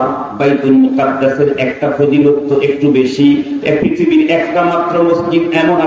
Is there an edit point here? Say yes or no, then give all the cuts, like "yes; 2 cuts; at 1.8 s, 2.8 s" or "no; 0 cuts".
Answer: no; 0 cuts